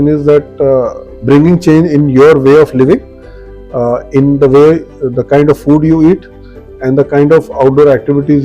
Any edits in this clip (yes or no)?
yes